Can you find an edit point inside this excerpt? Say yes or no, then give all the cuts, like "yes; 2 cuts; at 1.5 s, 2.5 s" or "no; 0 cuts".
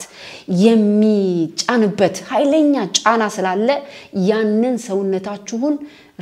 no; 0 cuts